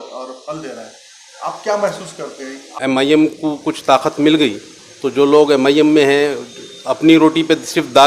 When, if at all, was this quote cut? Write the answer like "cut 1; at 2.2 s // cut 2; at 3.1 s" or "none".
cut 1; at 2.7 s